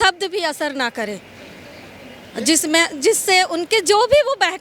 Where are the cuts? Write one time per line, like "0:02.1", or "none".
none

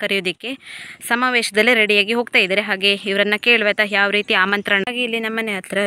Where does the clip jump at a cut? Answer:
0:04.8

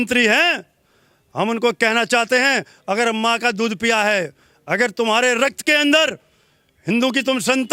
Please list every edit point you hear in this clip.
none

